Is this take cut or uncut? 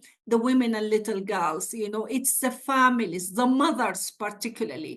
uncut